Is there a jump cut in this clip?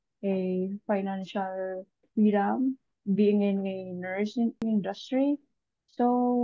yes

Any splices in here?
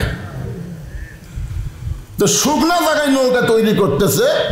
yes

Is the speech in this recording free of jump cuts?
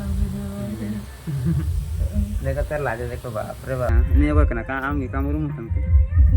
no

